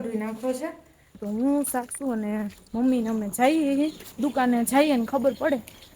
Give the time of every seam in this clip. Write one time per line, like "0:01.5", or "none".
0:01.2